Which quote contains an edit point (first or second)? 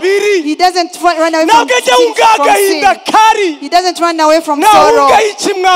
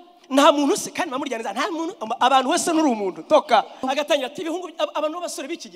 second